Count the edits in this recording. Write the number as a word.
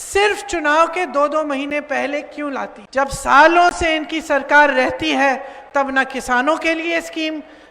one